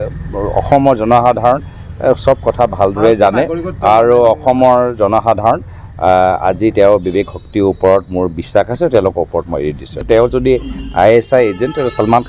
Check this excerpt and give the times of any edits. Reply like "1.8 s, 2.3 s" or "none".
10.0 s